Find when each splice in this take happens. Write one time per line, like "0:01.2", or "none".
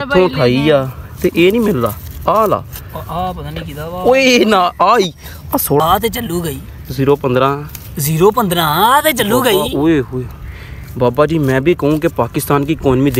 0:05.8